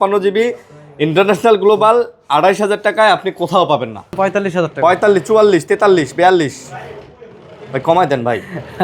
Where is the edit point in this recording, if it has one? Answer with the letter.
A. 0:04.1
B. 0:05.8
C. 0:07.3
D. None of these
A